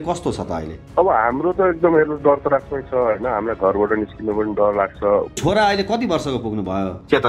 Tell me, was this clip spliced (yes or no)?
yes